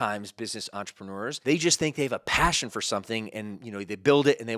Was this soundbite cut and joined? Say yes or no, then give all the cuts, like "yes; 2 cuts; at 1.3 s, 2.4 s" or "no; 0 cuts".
yes; 1 cut; at 1.4 s